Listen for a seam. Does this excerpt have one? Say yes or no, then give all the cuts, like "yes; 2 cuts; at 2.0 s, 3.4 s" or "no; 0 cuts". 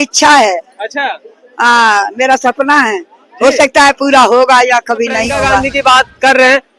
yes; 1 cut; at 5.7 s